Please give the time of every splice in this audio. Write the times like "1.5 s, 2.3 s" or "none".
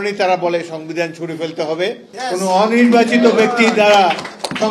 2.1 s

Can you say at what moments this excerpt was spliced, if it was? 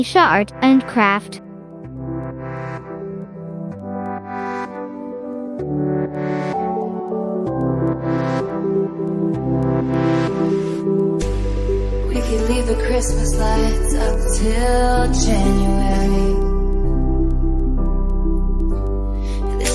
1.2 s

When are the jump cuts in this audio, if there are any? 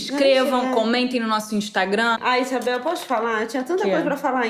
2.2 s

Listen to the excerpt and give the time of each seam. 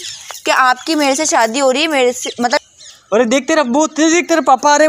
2.6 s

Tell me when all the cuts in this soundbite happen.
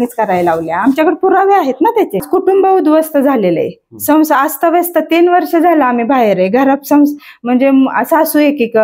2.3 s

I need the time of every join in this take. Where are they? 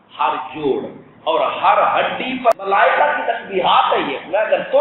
2.6 s

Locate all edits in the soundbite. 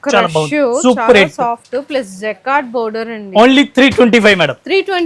none

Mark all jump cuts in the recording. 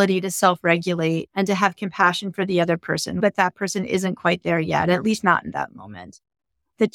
1.3 s, 3.2 s

